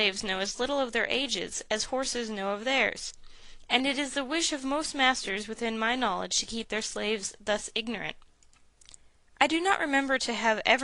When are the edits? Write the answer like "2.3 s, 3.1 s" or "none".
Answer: 7.1 s